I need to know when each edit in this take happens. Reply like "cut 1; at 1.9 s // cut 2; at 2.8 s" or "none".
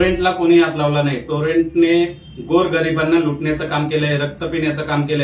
none